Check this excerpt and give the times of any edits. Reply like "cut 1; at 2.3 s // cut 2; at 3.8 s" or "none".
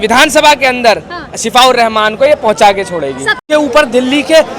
cut 1; at 3.4 s